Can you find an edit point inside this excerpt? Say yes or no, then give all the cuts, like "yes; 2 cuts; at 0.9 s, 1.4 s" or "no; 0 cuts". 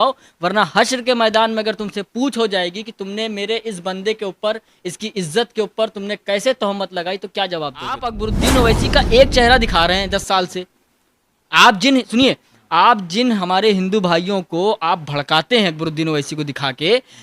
yes; 1 cut; at 8.1 s